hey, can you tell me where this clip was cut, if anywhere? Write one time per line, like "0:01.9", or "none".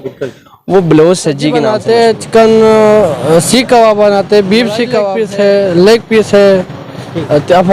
0:01.7
0:05.1

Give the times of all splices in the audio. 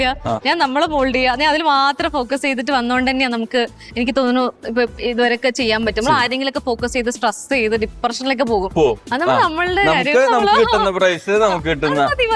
none

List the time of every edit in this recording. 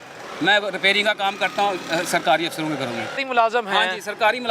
0:03.2

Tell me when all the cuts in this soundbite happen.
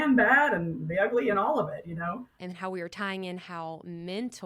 0:02.4

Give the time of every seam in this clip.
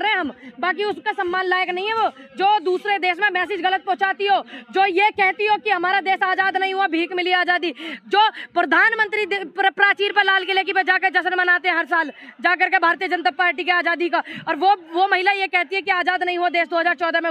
none

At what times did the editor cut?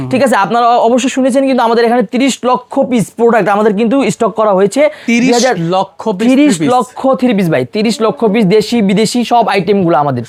none

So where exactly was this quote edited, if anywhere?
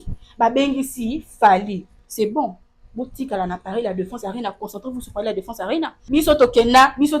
0:06.0

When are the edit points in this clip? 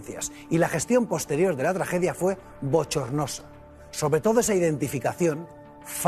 none

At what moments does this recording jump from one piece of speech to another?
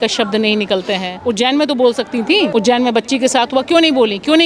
0:01.1
0:02.5

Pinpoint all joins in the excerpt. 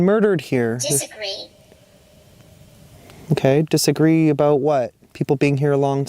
0:05.0

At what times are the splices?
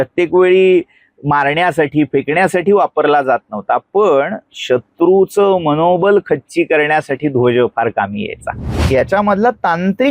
0:08.8

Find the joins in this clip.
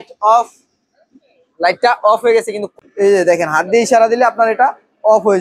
0:02.7

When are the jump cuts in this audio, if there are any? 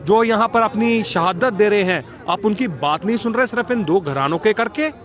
none

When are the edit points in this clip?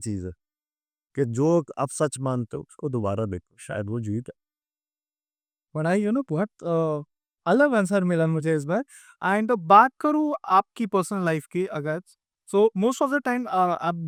none

